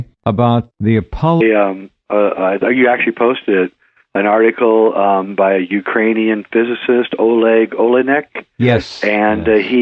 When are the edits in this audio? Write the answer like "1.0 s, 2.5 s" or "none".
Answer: none